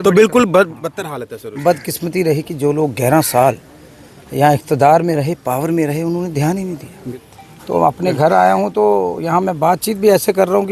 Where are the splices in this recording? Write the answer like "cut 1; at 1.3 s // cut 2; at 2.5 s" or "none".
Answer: cut 1; at 6.9 s

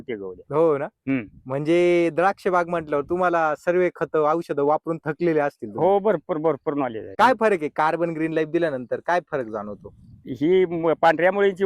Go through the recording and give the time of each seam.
cut 1; at 7.0 s

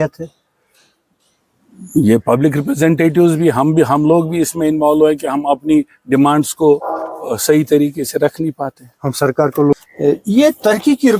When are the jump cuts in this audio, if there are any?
cut 1; at 9.7 s

